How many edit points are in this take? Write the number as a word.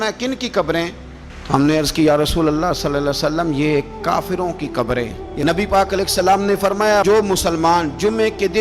one